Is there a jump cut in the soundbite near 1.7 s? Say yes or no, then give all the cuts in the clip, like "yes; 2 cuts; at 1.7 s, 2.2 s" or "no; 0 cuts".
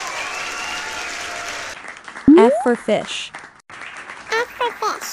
yes; 1 cut; at 1.7 s